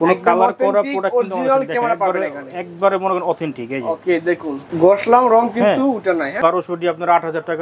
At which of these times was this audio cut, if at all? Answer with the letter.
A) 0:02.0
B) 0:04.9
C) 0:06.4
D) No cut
C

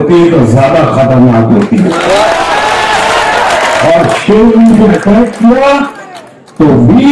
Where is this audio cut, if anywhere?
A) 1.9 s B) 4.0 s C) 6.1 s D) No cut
D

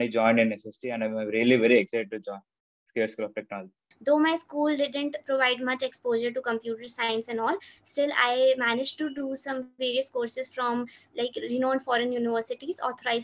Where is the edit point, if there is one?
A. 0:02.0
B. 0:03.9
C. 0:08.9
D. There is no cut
B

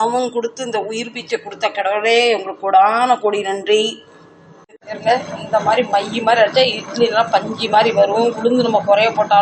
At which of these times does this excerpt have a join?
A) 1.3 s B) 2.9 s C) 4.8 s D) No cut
C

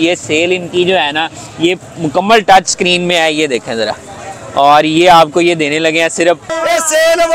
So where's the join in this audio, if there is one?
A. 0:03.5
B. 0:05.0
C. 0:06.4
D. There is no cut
C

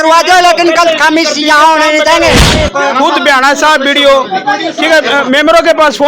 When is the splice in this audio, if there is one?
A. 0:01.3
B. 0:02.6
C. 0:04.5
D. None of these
B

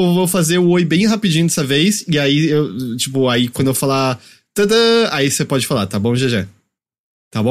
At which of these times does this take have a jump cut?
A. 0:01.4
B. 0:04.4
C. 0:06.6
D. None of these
C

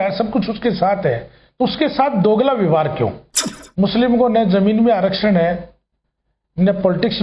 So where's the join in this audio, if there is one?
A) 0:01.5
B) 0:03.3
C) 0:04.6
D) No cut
B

